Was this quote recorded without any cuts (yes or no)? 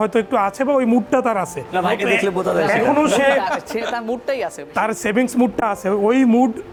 yes